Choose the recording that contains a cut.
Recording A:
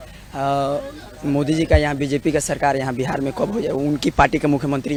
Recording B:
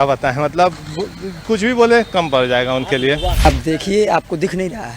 B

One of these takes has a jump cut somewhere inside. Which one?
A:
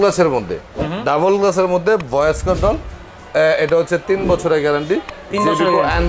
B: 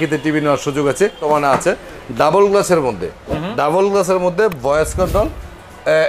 B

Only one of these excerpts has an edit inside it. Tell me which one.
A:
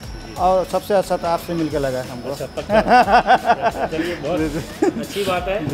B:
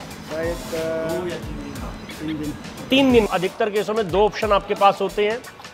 B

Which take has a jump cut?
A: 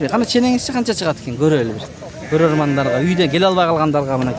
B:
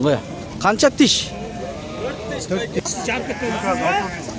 B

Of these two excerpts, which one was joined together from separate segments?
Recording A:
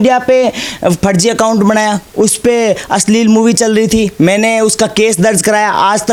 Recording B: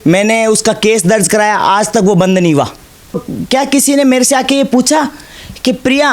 B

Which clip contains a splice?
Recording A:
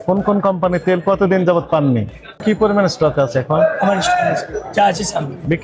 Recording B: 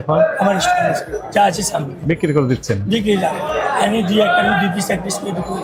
A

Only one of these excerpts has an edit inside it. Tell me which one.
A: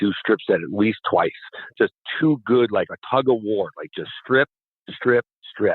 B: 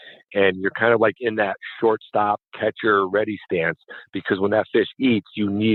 A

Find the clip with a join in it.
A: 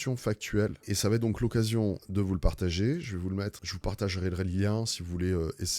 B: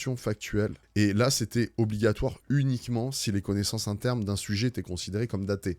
A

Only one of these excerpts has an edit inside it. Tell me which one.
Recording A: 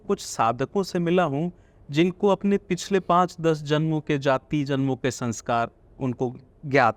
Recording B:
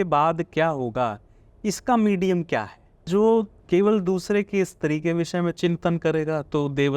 B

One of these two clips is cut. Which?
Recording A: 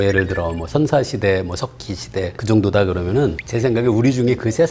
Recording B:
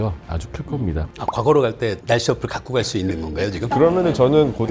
B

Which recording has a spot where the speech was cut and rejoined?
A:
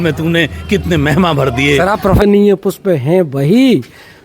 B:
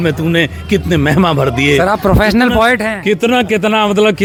A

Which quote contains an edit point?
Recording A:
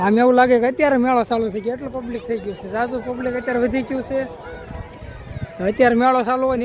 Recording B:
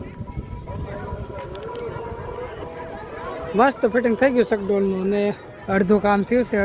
B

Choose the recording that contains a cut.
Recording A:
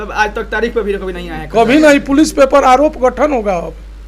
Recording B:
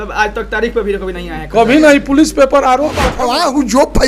B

